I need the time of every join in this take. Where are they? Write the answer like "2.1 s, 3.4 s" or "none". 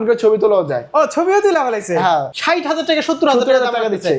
2.3 s